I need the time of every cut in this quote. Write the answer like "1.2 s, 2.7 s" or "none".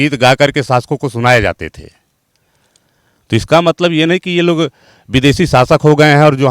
none